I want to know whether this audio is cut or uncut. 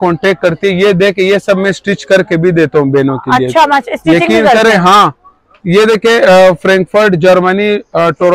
uncut